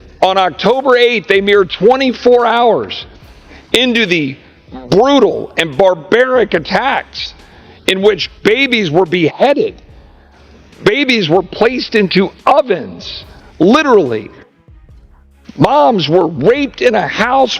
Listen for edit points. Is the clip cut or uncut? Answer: cut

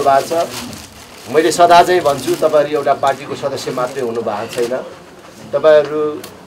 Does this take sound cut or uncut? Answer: uncut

